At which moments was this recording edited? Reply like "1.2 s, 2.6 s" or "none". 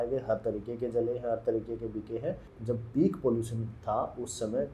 2.5 s